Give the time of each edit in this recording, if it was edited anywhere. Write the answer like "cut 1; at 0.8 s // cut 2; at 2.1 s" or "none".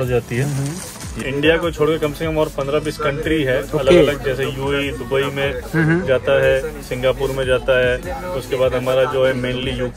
cut 1; at 1.2 s